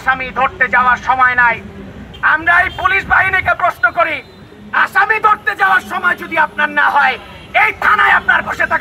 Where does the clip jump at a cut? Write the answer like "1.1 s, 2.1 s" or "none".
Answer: none